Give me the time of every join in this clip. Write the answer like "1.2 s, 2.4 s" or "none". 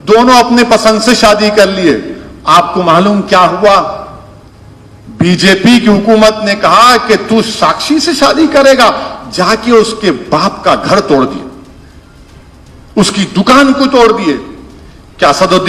none